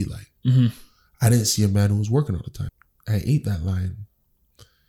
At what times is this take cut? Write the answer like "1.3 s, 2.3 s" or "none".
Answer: 2.6 s